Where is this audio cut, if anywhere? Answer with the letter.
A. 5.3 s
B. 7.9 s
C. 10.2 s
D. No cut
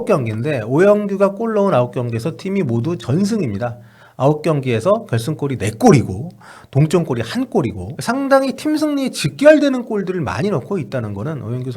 B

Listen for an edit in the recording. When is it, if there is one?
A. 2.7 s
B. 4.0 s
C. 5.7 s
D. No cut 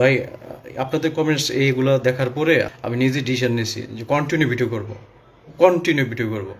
A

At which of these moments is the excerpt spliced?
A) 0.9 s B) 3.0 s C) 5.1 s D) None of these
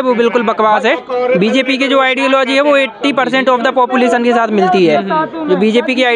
D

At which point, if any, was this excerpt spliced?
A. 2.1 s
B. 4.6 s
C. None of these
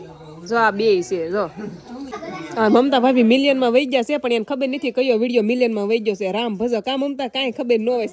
A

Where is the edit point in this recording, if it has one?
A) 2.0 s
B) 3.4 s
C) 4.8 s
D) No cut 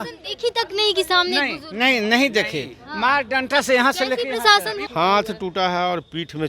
C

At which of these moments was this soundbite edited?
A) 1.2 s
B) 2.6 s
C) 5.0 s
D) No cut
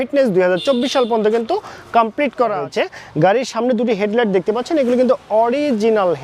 B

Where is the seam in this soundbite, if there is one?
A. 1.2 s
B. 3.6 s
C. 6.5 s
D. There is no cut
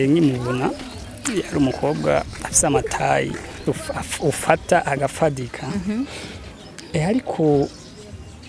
B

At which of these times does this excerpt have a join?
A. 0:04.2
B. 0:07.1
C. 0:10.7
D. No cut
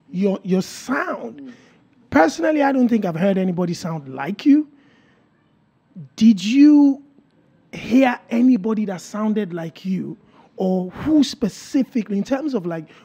D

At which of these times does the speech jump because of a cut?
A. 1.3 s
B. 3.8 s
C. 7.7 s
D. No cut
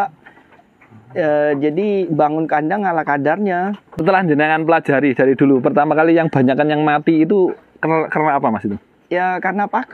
B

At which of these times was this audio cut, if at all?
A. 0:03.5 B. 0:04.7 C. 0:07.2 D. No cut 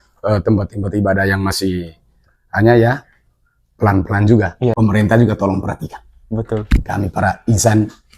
B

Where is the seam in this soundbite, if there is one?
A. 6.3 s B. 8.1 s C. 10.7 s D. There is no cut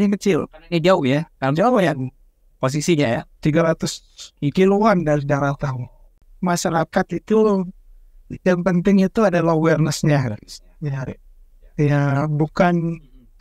A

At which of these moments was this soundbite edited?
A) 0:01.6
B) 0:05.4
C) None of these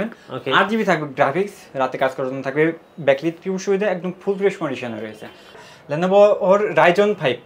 B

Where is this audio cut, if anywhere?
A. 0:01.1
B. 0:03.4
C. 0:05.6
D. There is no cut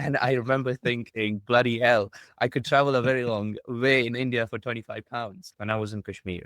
C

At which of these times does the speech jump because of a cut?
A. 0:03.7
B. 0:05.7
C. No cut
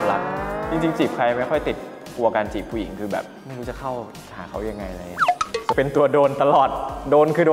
B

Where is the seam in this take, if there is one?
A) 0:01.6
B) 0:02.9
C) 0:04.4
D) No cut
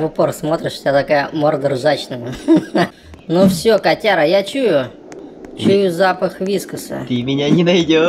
B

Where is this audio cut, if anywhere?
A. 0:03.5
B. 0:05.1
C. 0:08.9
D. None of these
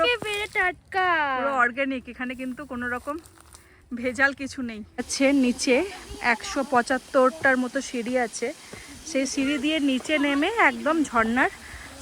B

